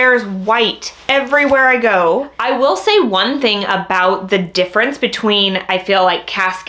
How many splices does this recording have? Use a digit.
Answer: 1